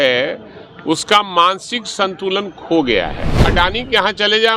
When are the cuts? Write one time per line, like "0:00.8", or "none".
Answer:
0:03.5